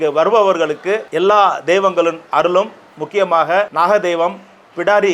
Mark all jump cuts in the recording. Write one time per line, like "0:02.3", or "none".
0:01.1
0:03.7